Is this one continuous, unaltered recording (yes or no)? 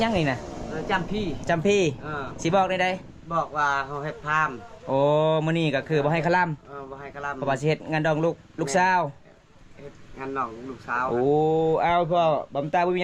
yes